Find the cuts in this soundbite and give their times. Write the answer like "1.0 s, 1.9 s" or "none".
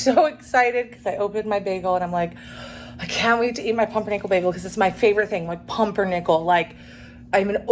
none